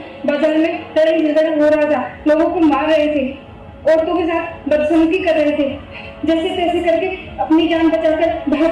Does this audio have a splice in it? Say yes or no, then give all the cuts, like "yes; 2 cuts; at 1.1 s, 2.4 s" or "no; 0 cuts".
no; 0 cuts